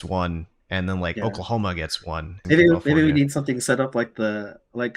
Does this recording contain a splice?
yes; 1 cut; at 2.3 s

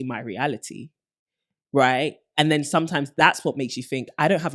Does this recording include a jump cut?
no; 0 cuts

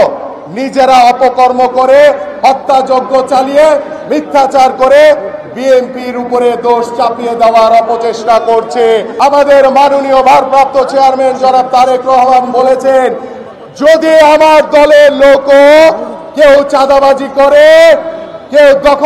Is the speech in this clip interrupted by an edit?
yes; 1 cut; at 9.1 s

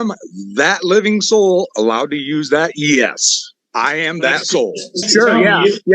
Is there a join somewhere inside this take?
yes; 1 cut; at 5.0 s

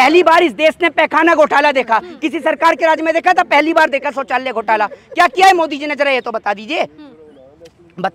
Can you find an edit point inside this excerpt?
no; 0 cuts

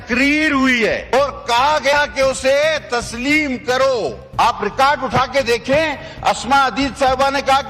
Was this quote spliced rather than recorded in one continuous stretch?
yes; 2 cuts; at 1.2 s, 3.8 s

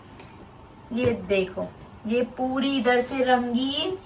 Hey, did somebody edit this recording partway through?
no; 0 cuts

